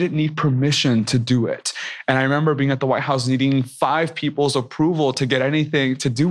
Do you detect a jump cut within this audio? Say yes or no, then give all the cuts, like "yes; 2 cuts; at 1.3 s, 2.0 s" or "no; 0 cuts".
no; 0 cuts